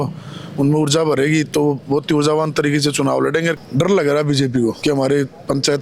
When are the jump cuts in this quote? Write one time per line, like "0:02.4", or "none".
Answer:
0:03.6
0:04.8

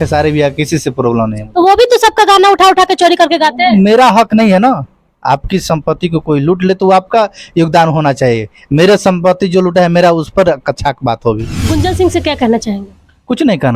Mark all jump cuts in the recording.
0:11.6

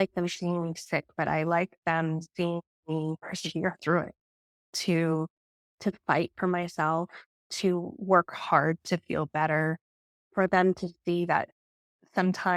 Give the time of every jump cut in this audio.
none

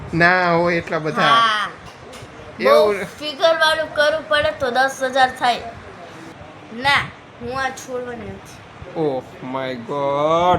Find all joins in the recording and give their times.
0:06.2

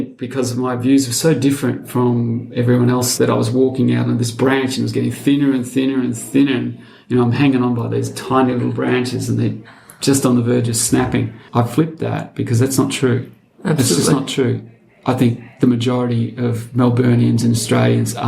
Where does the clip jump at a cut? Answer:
0:03.1
0:11.4

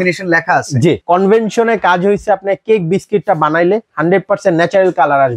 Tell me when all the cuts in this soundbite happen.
0:01.0

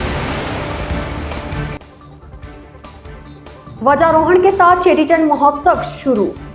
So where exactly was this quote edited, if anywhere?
0:03.4

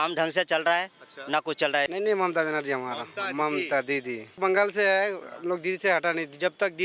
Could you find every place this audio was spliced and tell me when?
0:01.9
0:04.4

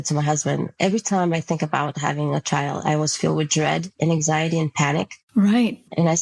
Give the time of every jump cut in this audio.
none

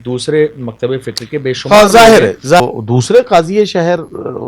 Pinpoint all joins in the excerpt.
0:02.6

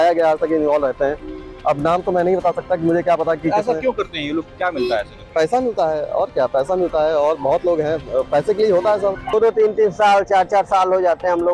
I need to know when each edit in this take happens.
0:09.3

